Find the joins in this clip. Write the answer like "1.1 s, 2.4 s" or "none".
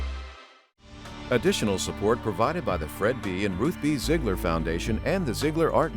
1.1 s